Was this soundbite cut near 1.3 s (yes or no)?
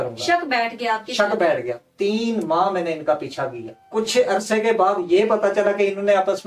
no